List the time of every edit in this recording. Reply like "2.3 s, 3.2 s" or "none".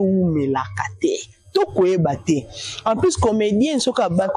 none